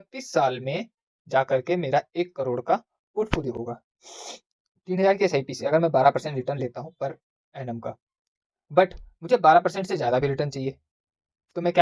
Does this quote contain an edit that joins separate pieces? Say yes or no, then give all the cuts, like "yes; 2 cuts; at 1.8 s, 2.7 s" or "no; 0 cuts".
no; 0 cuts